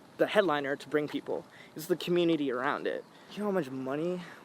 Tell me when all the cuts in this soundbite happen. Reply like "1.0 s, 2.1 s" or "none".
3.2 s